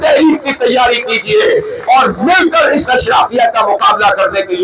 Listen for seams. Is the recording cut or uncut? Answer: uncut